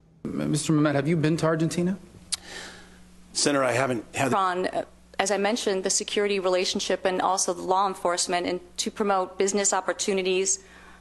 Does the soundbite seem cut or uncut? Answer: uncut